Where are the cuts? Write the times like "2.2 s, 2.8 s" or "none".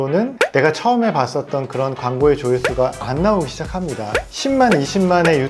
4.3 s